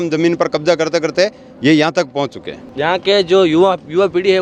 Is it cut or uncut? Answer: cut